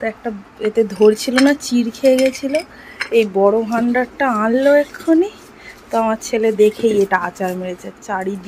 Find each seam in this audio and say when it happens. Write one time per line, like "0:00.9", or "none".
none